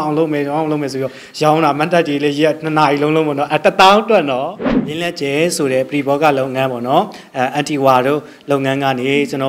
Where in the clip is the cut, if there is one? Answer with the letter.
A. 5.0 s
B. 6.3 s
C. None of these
A